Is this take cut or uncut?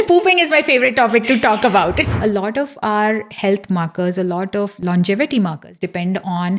cut